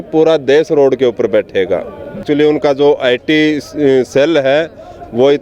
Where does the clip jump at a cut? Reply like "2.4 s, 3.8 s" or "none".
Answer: 2.2 s